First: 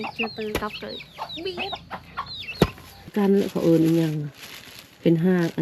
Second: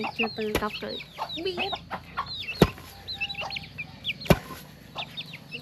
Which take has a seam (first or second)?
first